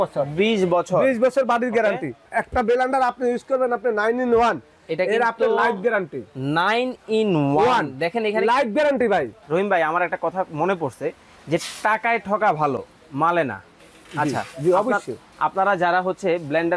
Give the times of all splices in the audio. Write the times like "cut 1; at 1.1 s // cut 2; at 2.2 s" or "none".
cut 1; at 2.3 s // cut 2; at 9.4 s

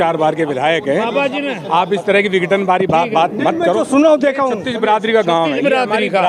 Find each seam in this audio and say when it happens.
none

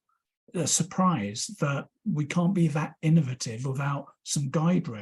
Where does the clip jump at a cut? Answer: none

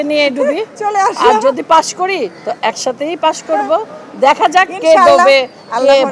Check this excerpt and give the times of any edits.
none

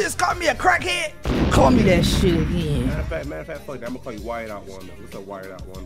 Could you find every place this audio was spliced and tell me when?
none

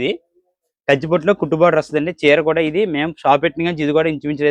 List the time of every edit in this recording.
none

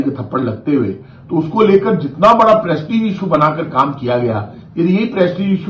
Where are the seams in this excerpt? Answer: none

